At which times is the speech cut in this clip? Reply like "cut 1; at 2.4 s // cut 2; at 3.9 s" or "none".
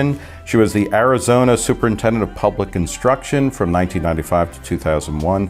none